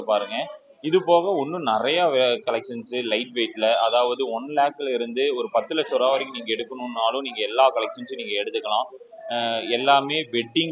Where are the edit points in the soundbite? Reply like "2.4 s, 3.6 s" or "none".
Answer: none